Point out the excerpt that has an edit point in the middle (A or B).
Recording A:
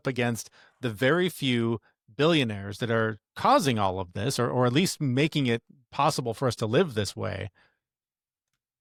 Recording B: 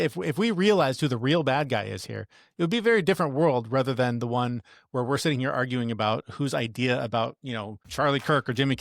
B